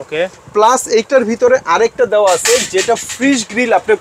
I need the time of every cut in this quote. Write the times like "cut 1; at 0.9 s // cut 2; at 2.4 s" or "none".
none